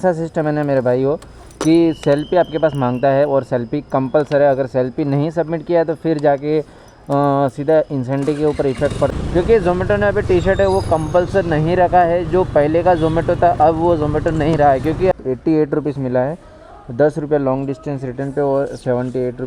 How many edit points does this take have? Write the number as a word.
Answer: two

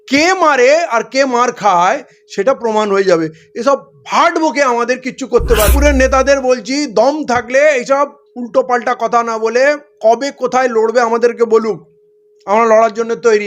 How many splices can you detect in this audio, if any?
one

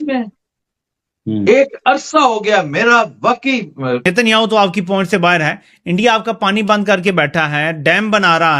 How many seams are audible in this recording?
one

